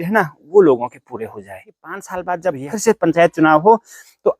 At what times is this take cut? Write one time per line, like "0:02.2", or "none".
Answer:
0:02.1